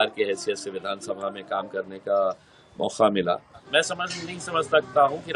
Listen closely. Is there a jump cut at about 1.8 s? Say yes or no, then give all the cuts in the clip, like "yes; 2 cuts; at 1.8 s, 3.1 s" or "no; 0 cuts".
no; 1 cut; at 3.6 s